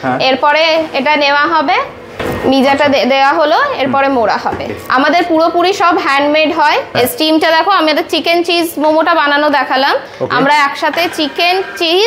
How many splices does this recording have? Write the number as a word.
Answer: three